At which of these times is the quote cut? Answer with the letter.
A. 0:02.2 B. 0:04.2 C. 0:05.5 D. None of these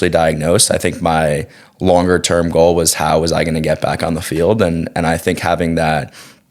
D